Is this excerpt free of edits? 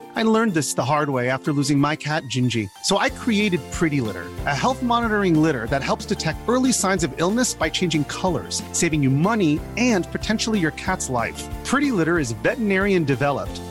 yes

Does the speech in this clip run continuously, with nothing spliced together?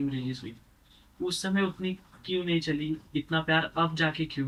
yes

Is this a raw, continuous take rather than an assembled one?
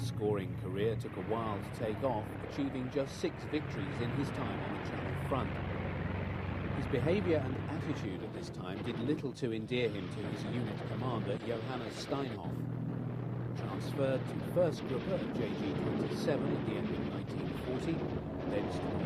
no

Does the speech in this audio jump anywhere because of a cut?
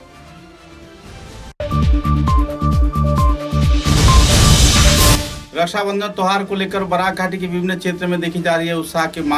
yes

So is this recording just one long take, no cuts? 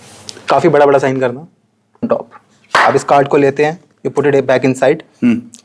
no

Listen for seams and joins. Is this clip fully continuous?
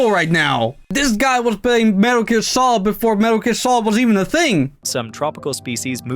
no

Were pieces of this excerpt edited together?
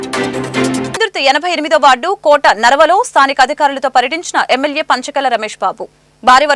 yes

